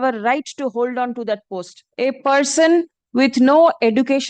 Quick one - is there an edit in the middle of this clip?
yes; 1 cut; at 1.8 s

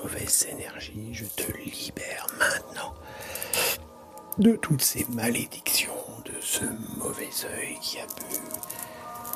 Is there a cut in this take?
no; 0 cuts

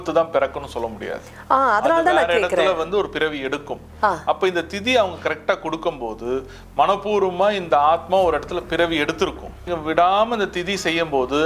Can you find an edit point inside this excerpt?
yes; 1 cut; at 9.6 s

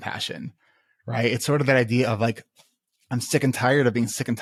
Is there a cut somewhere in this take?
no; 0 cuts

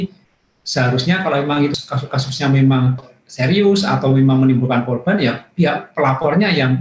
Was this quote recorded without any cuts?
no; 2 cuts; at 1.8 s, 3.1 s

